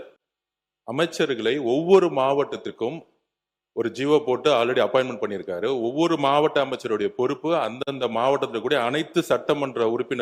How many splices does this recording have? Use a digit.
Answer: 0